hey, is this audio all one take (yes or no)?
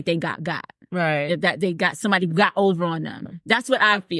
no